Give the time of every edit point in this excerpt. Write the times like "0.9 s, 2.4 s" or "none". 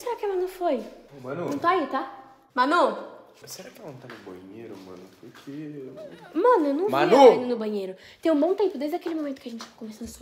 none